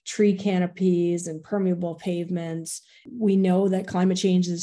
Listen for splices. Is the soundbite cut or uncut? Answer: cut